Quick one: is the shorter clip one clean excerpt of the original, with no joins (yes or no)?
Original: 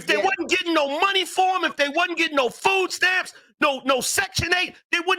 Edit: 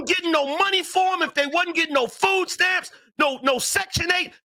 yes